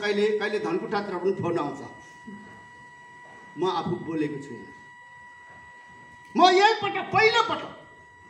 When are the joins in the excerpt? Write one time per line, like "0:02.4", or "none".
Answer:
none